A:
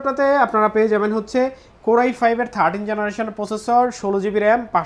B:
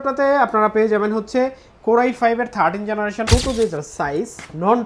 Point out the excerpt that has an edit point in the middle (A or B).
B